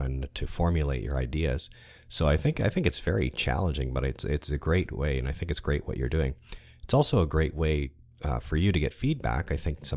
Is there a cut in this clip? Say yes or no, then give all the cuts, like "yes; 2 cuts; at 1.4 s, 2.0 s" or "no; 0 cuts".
yes; 1 cut; at 6.3 s